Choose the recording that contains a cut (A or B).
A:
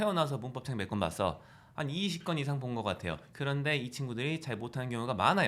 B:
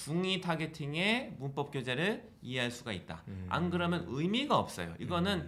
A